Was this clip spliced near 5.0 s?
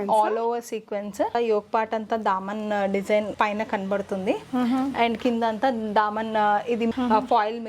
no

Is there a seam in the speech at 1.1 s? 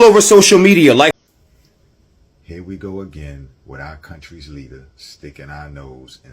yes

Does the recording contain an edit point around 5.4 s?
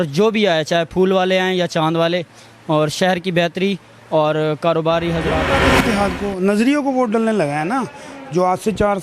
yes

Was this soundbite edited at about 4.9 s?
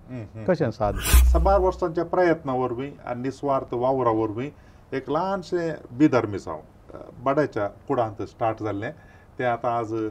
no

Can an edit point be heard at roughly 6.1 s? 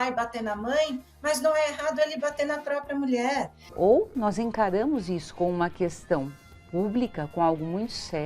no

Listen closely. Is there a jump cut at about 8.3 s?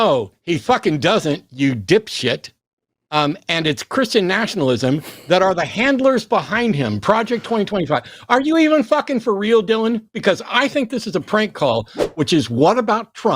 no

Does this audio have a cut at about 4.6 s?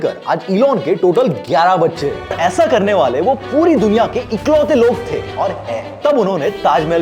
no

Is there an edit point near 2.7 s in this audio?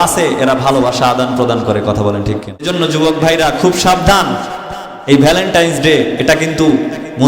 yes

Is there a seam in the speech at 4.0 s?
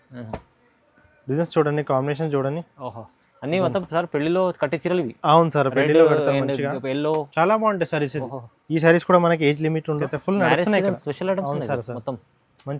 no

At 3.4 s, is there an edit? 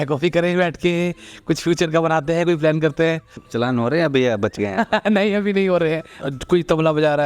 yes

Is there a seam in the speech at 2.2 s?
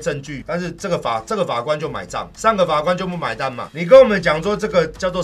yes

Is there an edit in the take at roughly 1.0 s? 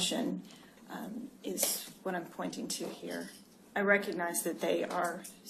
yes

